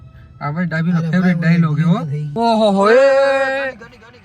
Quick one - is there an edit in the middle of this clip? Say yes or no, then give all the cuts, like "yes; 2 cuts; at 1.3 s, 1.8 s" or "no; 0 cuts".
yes; 1 cut; at 2.2 s